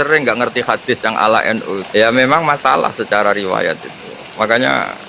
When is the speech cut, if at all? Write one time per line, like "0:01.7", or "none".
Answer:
0:01.8